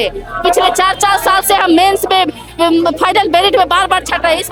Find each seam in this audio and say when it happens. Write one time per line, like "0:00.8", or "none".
none